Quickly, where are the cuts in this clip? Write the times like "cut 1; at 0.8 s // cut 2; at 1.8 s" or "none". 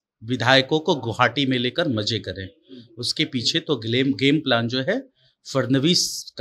none